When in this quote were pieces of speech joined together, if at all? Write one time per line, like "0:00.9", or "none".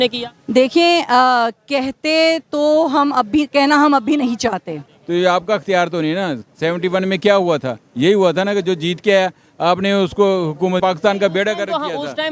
0:04.9
0:10.8